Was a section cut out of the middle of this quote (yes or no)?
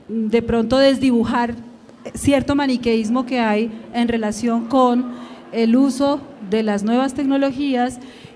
no